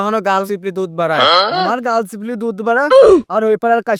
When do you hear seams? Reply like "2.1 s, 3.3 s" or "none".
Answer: none